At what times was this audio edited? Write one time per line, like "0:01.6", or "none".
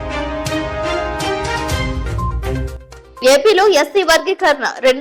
0:02.6